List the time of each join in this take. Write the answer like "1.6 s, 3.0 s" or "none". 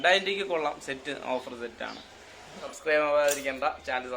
2.6 s